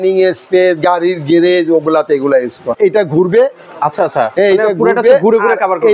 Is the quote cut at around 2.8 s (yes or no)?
yes